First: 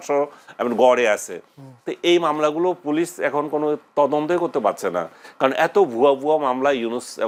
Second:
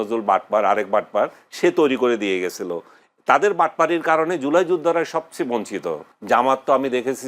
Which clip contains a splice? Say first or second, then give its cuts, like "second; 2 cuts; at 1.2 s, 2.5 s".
second; 1 cut; at 6.1 s